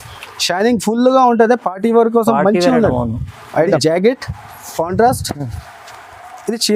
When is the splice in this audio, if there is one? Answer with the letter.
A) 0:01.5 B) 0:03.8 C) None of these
B